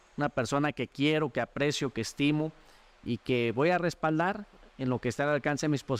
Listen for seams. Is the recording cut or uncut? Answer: uncut